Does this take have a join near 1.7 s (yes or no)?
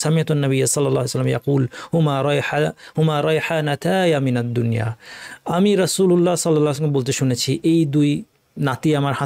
no